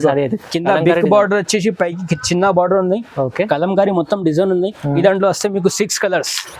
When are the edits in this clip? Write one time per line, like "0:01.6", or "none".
none